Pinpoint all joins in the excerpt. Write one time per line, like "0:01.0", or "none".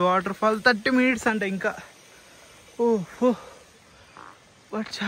none